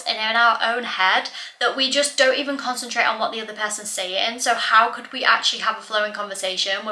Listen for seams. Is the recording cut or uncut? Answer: uncut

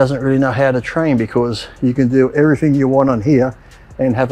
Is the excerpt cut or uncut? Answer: uncut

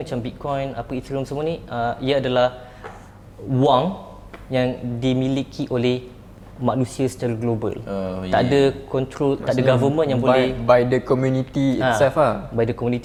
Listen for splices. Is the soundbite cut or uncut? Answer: uncut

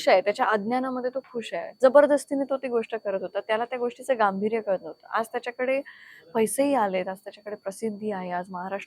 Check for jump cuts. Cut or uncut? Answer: cut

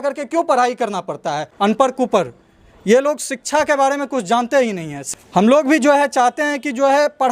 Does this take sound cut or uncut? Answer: cut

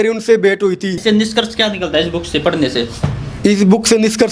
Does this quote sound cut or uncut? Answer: cut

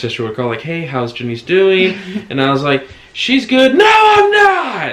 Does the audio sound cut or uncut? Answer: uncut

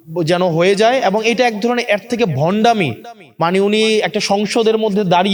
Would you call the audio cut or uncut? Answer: uncut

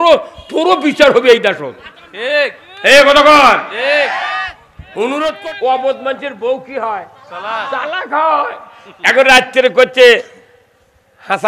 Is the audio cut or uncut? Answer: cut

